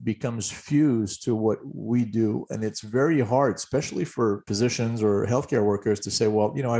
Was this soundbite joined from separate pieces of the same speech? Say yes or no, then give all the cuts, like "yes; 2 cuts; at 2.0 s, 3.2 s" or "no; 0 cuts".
no; 0 cuts